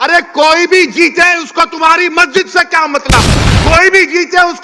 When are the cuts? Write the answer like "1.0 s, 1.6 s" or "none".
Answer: 3.4 s